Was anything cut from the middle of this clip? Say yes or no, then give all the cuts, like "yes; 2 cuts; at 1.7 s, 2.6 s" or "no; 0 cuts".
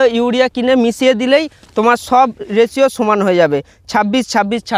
no; 0 cuts